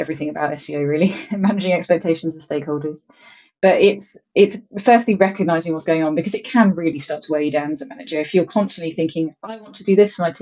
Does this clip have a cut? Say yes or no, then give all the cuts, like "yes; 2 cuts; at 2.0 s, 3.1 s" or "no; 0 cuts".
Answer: no; 0 cuts